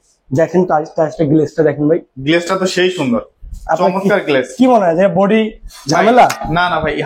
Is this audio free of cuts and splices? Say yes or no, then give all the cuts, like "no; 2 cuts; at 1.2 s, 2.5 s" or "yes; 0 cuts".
yes; 0 cuts